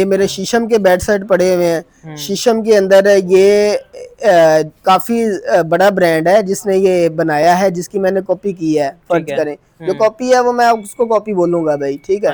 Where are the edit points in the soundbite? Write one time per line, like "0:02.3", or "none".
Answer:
none